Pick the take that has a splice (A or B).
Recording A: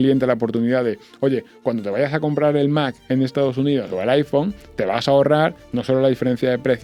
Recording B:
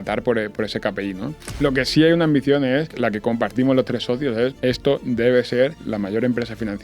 B